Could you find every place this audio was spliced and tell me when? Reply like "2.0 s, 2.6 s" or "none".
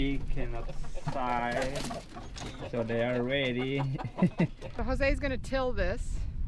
4.7 s